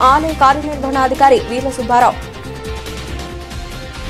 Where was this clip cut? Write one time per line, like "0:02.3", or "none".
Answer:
0:02.2